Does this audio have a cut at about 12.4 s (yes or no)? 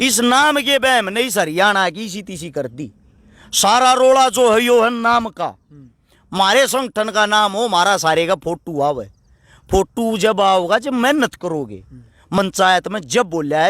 yes